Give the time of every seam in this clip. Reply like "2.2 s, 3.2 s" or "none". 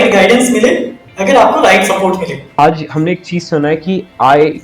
2.6 s